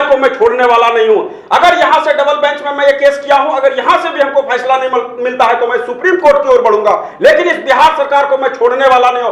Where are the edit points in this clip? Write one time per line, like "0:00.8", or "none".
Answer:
none